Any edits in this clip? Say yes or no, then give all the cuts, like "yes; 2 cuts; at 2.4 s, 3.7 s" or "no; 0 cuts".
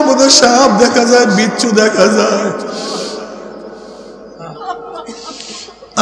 yes; 1 cut; at 4.6 s